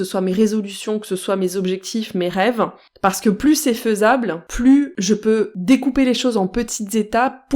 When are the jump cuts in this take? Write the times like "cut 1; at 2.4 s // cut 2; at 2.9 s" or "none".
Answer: cut 1; at 4.4 s // cut 2; at 5.5 s